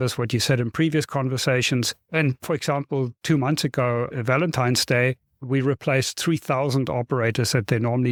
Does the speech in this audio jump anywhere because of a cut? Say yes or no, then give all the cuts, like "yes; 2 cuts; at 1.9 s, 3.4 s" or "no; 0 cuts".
no; 0 cuts